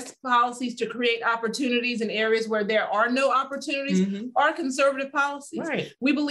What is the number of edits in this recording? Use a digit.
0